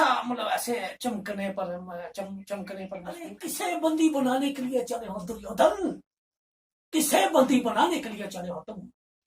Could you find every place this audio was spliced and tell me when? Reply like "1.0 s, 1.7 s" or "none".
3.5 s

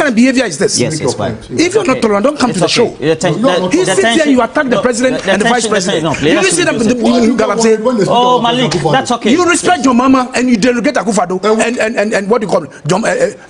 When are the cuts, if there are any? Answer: none

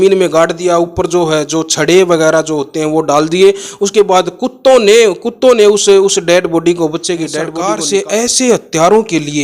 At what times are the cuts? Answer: 7.5 s

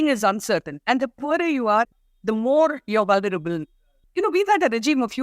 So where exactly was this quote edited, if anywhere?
1.9 s, 4.0 s

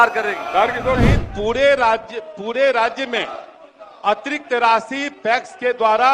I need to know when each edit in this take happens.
1.0 s

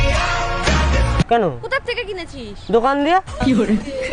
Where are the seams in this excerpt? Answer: 1.3 s

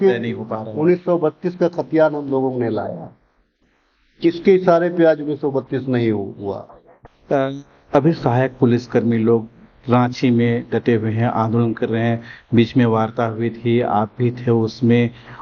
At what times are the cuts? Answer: 6.9 s

